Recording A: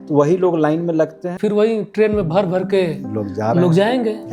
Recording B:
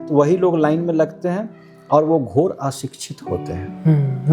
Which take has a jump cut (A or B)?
A